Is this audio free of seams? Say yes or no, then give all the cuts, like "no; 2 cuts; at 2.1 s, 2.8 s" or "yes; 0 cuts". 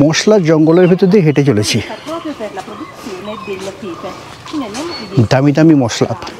yes; 0 cuts